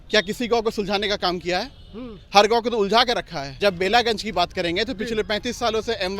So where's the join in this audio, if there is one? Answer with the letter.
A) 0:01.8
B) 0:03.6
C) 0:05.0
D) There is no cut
B